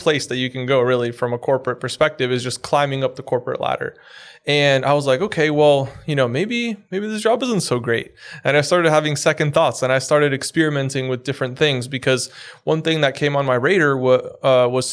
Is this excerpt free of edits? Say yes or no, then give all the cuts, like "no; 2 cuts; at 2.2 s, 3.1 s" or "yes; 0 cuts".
yes; 0 cuts